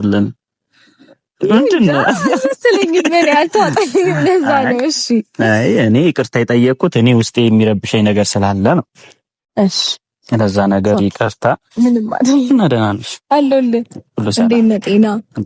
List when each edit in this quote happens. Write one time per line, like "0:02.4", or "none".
none